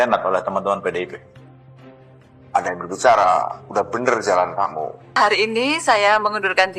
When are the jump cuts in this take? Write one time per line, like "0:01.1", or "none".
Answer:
0:05.1